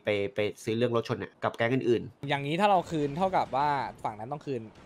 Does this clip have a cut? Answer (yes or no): yes